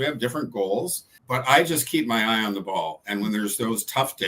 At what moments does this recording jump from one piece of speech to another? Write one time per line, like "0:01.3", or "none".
0:01.1